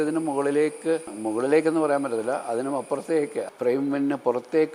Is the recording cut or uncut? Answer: cut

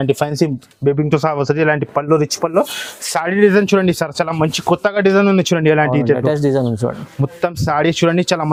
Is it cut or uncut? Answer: uncut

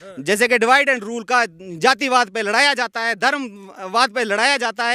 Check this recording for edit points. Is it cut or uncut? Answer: uncut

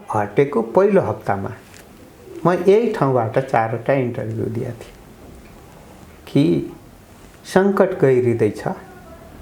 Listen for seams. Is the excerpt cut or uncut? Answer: uncut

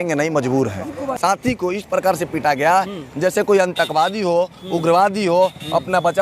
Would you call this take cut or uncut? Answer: cut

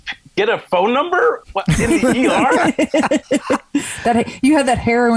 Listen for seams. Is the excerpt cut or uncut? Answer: uncut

